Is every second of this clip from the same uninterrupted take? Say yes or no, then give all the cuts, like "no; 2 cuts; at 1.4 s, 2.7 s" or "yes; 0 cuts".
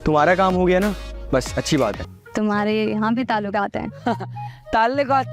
no; 1 cut; at 2.1 s